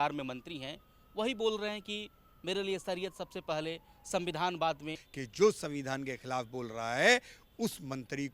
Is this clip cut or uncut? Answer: cut